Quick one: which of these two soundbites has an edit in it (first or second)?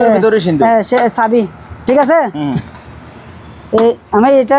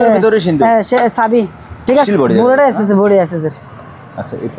second